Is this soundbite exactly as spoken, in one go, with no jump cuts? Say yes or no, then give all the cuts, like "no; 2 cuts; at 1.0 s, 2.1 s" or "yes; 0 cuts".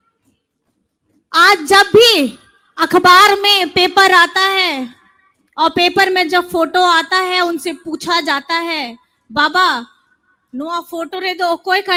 yes; 0 cuts